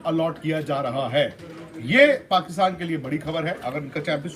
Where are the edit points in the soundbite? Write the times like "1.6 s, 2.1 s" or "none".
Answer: none